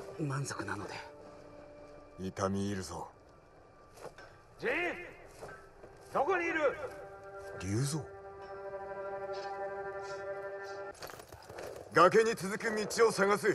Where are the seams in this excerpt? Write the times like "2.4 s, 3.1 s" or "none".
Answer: 10.9 s